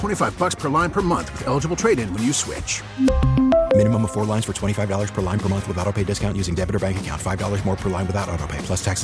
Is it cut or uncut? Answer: uncut